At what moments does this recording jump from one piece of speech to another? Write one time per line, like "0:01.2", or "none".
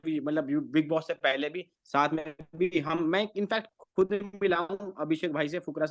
none

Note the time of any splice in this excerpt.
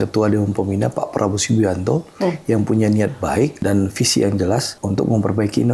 0:03.6
0:04.8

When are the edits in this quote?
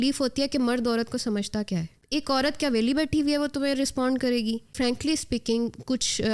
0:02.0
0:04.7

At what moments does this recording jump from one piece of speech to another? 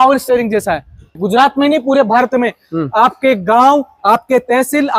0:01.2

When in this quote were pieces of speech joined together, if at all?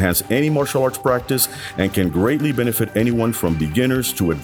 none

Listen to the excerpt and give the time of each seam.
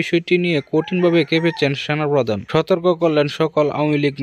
0:02.4

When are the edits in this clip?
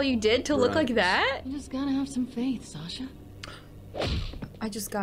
0:01.5

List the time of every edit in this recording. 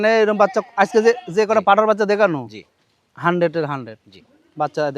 none

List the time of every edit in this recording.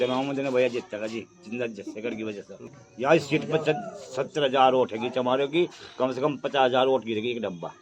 0:02.6

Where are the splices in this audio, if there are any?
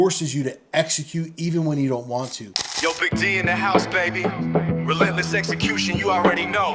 0:02.6

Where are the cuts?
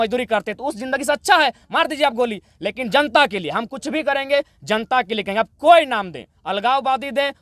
none

